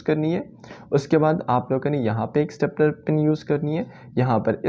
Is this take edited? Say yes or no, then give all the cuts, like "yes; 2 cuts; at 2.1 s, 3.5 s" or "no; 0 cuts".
no; 0 cuts